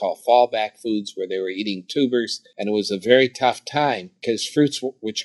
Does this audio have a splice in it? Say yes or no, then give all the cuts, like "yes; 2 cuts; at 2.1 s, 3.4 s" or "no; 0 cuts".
yes; 2 cuts; at 2.4 s, 4.1 s